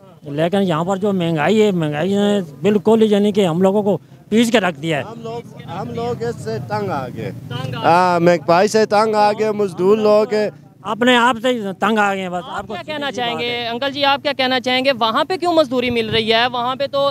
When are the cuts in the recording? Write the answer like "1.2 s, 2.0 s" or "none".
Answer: none

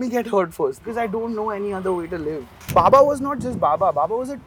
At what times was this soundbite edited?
0.8 s, 2.5 s

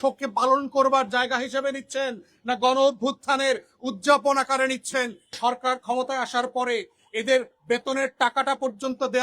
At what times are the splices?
5.4 s

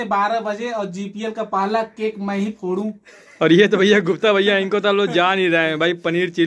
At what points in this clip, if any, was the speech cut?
none

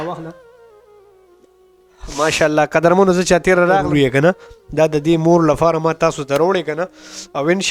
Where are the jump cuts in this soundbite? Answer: 3.9 s

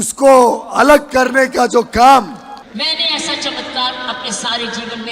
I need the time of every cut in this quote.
2.6 s

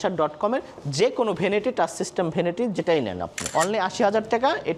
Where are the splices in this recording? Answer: 3.3 s

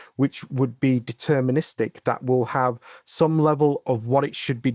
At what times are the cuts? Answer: 3.8 s

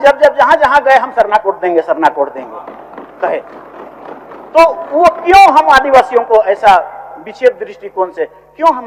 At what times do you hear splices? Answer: none

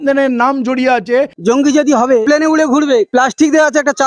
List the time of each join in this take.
1.3 s, 2.2 s, 3.1 s

